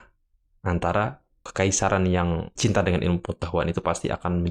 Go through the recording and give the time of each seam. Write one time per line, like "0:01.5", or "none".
0:01.5
0:02.5